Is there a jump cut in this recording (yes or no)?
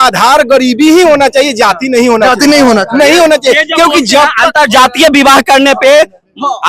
no